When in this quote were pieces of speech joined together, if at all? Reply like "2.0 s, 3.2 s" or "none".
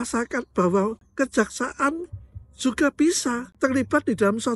1.0 s, 3.5 s